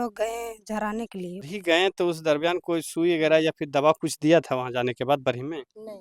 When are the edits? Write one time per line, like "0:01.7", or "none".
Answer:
0:01.5